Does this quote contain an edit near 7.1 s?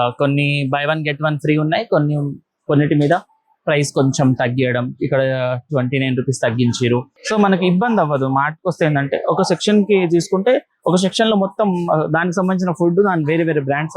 yes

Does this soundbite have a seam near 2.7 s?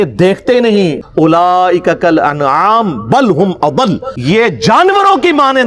no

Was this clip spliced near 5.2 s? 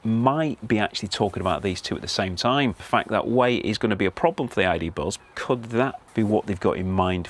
yes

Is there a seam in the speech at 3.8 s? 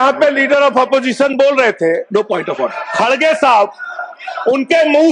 no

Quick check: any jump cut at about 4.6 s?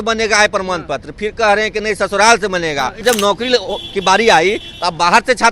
no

